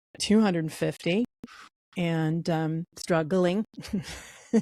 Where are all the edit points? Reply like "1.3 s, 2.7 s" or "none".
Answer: none